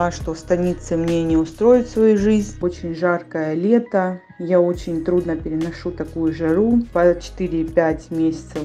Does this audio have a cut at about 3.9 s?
no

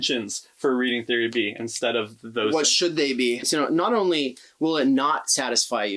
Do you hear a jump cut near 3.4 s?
yes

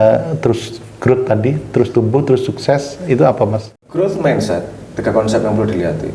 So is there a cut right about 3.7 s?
yes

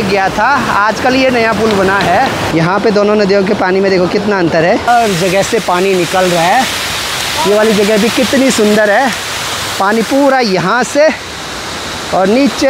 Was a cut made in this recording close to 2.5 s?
yes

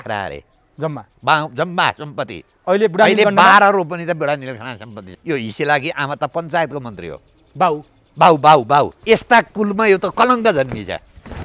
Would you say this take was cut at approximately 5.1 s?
yes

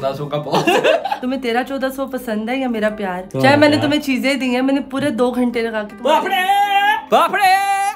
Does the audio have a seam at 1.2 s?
yes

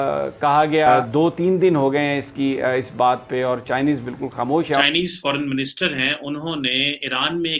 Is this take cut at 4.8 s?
yes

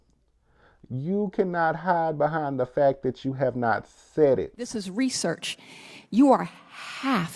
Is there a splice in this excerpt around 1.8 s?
no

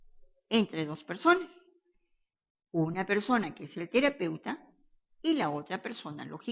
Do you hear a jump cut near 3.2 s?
yes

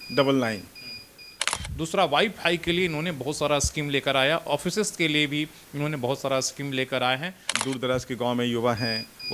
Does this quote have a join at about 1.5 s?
yes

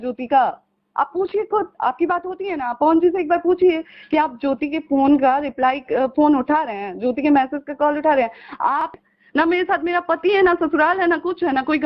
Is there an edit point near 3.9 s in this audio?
no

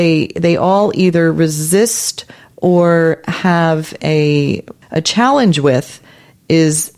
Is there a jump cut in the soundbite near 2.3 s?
no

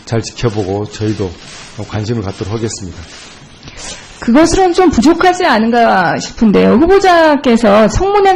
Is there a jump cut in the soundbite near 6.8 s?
yes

